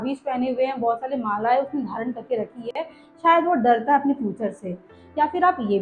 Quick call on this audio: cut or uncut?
uncut